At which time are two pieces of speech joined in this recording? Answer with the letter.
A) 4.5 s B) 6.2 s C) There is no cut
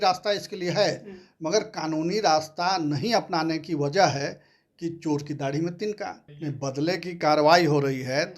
B